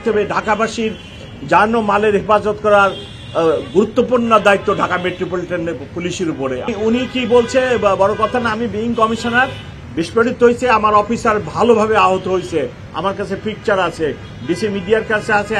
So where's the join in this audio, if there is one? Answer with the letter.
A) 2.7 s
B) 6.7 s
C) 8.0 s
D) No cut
B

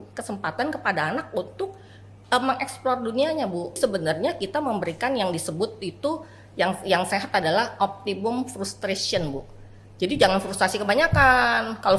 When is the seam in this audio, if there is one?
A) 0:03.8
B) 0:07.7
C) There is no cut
A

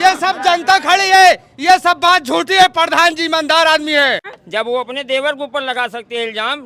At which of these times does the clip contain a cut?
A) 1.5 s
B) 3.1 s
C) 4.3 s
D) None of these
C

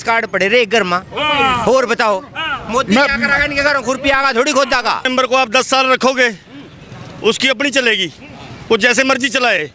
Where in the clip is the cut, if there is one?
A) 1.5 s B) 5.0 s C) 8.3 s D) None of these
B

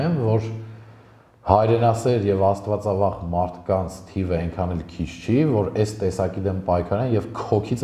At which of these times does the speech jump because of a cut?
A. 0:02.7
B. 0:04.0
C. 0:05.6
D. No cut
D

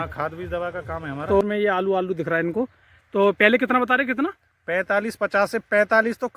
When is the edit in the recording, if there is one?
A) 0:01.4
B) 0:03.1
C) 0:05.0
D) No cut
A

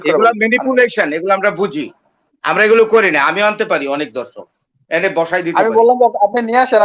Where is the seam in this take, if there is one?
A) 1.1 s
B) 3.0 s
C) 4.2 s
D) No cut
D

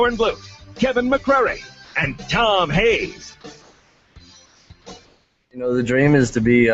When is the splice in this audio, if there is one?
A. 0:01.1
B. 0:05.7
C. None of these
B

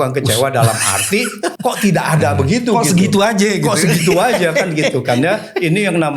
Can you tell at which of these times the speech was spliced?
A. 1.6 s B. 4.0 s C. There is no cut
A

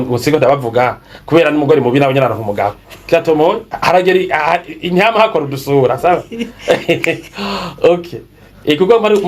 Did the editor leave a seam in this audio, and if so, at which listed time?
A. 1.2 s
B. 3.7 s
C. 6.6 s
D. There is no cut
B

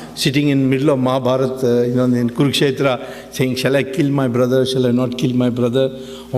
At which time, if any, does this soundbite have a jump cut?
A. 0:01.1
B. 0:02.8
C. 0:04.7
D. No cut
B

